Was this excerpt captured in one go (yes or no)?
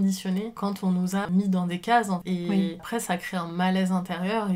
no